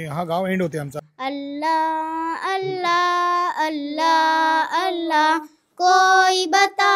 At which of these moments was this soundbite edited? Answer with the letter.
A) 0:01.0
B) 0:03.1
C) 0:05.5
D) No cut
A